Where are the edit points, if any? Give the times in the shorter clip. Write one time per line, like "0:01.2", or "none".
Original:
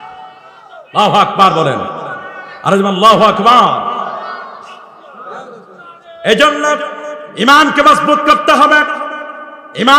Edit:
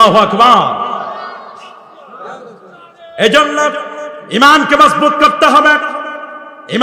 none